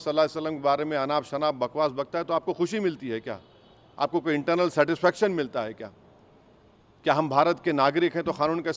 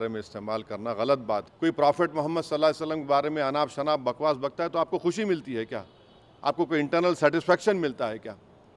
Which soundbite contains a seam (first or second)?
second